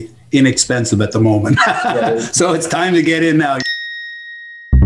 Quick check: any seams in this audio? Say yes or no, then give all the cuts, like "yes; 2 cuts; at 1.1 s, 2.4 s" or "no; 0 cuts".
yes; 1 cut; at 3.6 s